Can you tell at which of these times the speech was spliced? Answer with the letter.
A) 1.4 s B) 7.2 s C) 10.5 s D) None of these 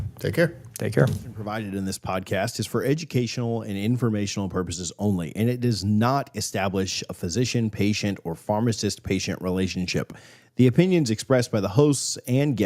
A